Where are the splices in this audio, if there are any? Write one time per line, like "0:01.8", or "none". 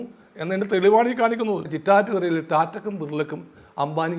0:01.7